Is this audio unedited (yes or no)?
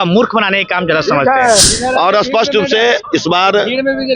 no